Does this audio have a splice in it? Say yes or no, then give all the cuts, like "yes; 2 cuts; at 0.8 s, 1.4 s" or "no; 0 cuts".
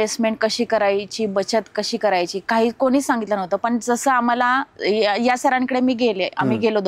no; 0 cuts